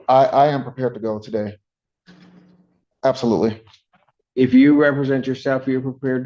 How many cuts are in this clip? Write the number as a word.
one